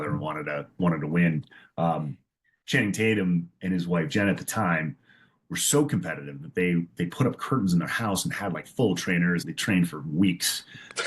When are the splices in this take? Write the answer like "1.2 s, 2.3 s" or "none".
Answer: 9.5 s